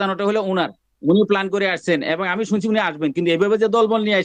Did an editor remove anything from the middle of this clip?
no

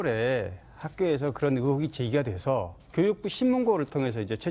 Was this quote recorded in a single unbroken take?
yes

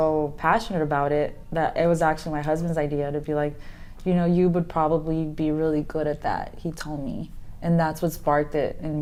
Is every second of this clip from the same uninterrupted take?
yes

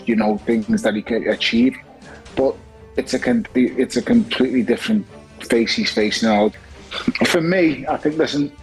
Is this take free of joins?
no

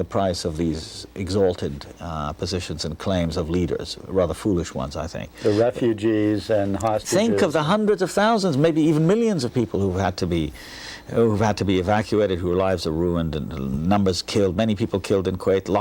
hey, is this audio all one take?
yes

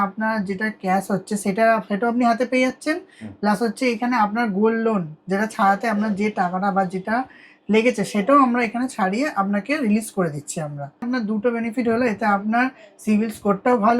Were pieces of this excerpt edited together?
yes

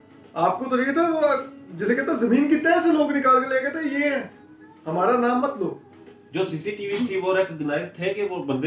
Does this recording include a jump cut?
no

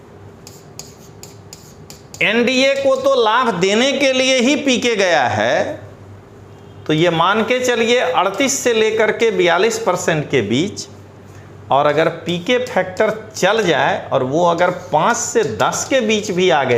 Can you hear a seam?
no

